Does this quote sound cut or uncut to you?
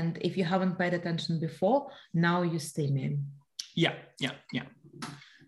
uncut